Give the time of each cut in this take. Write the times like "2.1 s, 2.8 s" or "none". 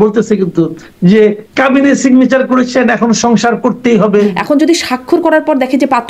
4.4 s